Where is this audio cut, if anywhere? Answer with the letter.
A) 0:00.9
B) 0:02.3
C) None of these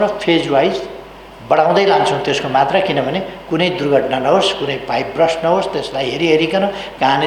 C